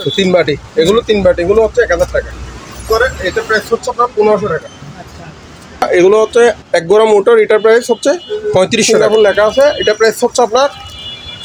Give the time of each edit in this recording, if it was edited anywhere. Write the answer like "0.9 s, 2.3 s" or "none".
2.9 s, 5.9 s, 8.9 s

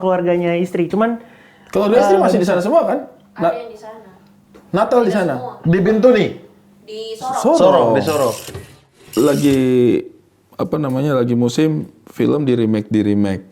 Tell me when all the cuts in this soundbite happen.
8.5 s

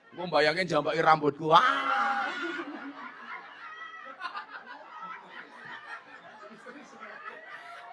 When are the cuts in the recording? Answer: none

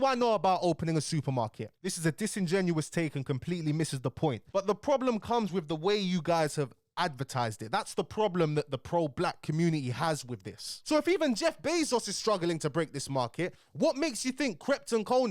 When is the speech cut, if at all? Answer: 1.7 s, 4.5 s, 10.7 s

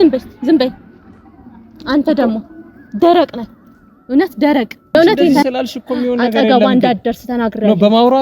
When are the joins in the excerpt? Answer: 4.9 s

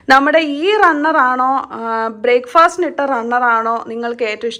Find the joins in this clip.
none

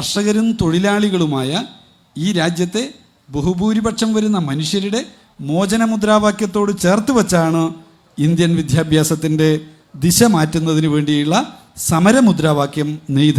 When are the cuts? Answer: none

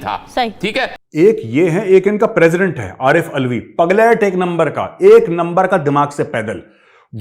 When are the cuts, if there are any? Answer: 1.0 s

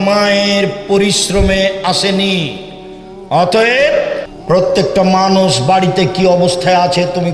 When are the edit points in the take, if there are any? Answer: 4.3 s

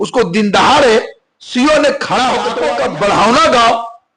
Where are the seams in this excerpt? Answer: 2.6 s

